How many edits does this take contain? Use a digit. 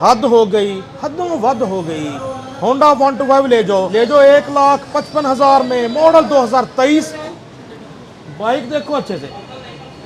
2